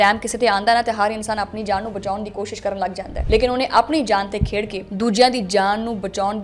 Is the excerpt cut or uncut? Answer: uncut